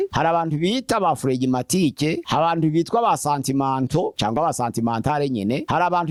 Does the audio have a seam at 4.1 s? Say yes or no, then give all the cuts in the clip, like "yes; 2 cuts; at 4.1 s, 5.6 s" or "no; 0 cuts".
no; 0 cuts